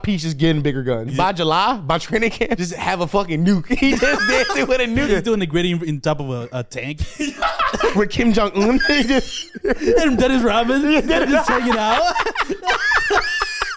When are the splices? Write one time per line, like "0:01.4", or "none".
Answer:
0:01.1
0:02.6
0:05.1
0:07.9

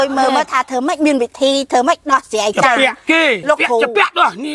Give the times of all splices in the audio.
0:03.4

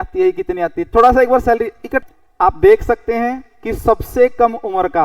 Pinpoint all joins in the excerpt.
0:01.9

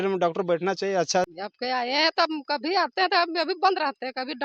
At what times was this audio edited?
0:01.3

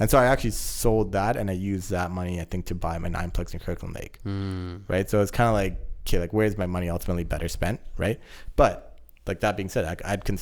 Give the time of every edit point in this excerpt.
none

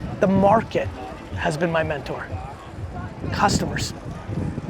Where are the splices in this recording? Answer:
none

